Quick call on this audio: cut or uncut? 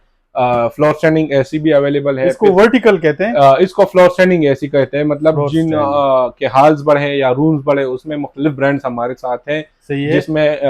uncut